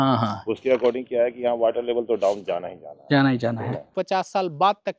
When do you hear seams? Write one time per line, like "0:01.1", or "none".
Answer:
0:03.9